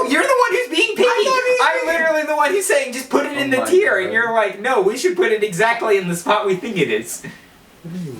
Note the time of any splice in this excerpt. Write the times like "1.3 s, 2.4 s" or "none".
none